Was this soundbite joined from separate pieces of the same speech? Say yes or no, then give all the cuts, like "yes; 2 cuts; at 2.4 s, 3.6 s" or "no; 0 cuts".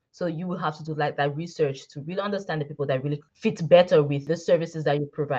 yes; 2 cuts; at 3.3 s, 4.2 s